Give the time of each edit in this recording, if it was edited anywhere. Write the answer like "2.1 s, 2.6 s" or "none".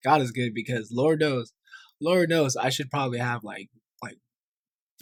none

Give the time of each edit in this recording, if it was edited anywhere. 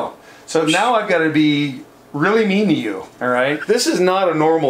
3.6 s

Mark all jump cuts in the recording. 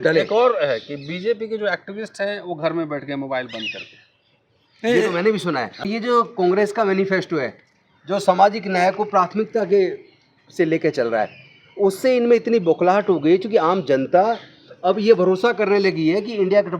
5.8 s

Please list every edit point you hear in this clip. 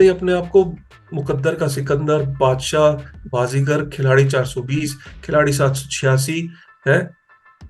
none

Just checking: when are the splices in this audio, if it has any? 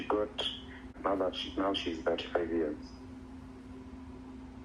0.9 s

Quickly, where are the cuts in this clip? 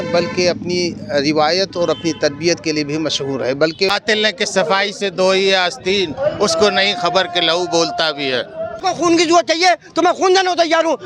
3.9 s, 8.8 s

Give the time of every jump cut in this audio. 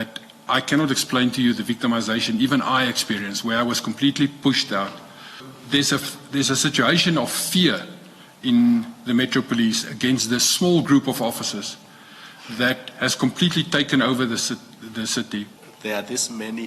5.5 s, 15.6 s

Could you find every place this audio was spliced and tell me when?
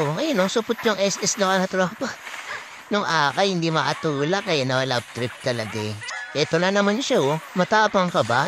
6.0 s

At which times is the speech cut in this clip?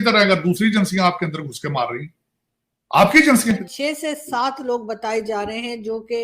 3.7 s

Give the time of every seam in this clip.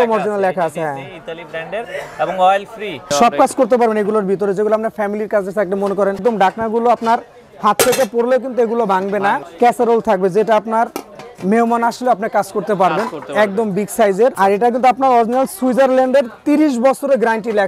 3.1 s, 6.2 s, 9.5 s, 14.3 s

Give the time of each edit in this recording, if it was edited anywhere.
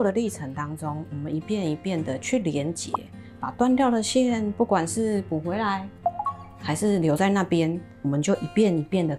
none

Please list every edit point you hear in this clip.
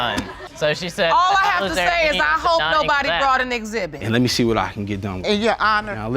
4.0 s

